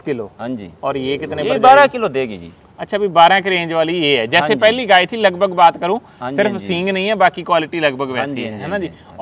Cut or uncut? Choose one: uncut